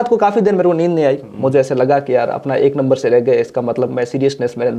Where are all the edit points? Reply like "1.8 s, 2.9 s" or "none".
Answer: none